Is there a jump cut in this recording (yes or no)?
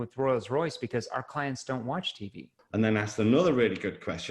yes